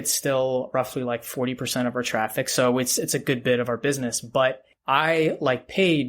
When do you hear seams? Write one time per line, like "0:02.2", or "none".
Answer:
0:04.7